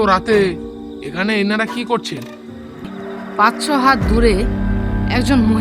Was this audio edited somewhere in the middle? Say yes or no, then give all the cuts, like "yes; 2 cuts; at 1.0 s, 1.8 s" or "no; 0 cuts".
yes; 1 cut; at 2.9 s